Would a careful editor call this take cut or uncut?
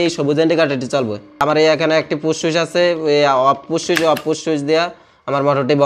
cut